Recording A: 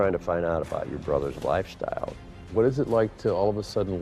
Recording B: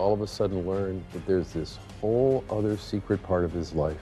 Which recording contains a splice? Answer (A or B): A